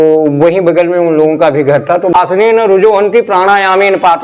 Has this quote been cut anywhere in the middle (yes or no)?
yes